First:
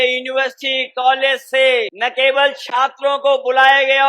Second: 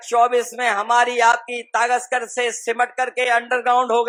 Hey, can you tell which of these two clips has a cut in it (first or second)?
first